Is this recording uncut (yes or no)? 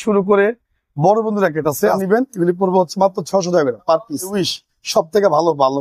no